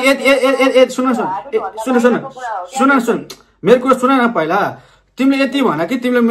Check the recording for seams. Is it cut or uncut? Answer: uncut